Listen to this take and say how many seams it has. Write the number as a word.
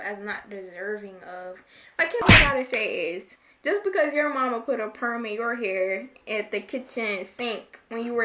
one